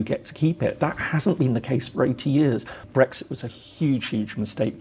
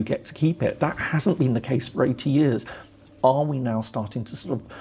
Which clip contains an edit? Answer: first; 1 cut; at 2.8 s

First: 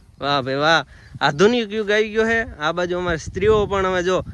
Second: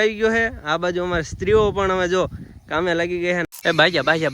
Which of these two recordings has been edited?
second; 1 cut; at 3.5 s

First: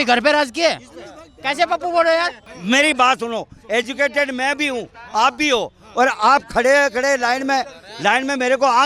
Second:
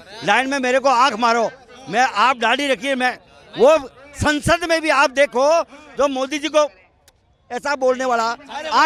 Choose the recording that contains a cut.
first; 1 cut; at 2.5 s

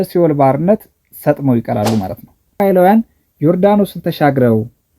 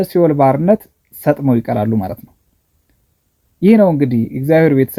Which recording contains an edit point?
first; 1 cut; at 2.6 s

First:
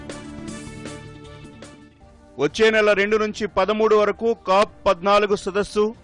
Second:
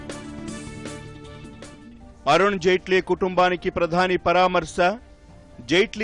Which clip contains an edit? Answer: second; 1 cut; at 2.0 s

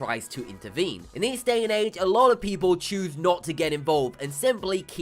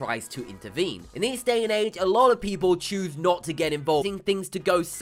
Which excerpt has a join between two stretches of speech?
first; 1 cut; at 4.0 s

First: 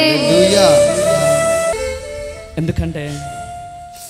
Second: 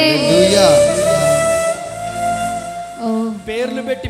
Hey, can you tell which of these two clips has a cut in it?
first; 1 cut; at 1.8 s

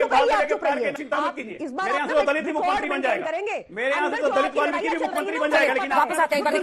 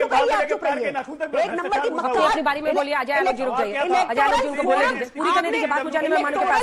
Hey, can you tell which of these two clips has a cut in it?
first; 1 cut; at 1.0 s

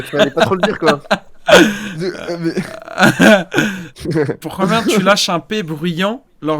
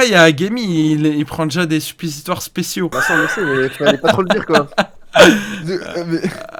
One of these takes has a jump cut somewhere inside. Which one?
first; 1 cut; at 3.9 s

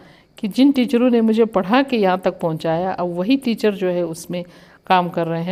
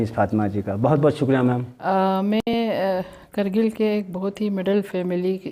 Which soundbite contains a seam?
second; 1 cut; at 1.7 s

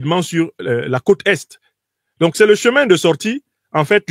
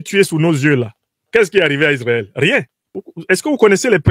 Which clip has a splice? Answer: second; 1 cut; at 3.1 s

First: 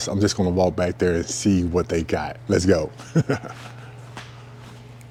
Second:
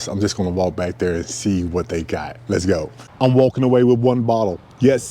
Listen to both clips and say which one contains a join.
second; 1 cut; at 3.0 s

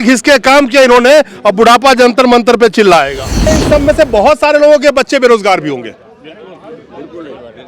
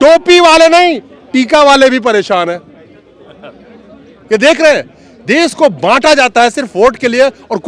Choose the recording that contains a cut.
first; 1 cut; at 3.5 s

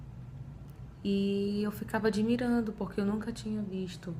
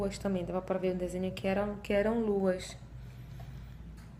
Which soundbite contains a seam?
first; 1 cut; at 1.8 s

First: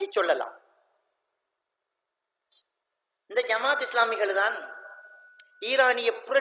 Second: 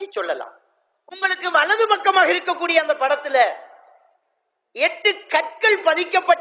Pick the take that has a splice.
second; 1 cut; at 1.2 s

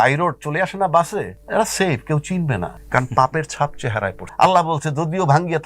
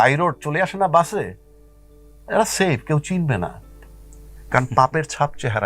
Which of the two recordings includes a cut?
first; 3 cuts; at 1.4 s, 2.8 s, 4.2 s

